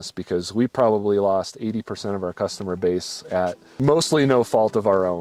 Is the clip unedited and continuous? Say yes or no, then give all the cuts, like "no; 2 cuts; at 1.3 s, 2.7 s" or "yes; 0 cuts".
yes; 0 cuts